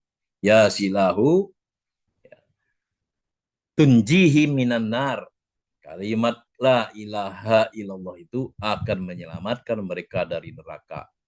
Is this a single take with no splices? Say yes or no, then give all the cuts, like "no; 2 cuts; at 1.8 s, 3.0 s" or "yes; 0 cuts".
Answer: yes; 0 cuts